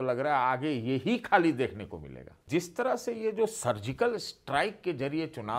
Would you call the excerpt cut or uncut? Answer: cut